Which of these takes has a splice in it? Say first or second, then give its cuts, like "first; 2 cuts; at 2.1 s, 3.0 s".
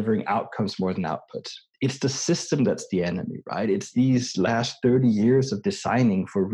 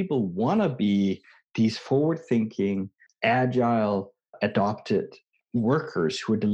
second; 3 cuts; at 3.0 s, 4.3 s, 5.3 s